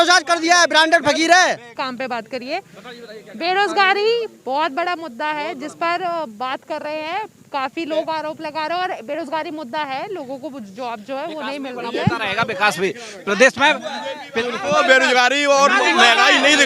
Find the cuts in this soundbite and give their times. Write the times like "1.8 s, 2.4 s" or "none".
none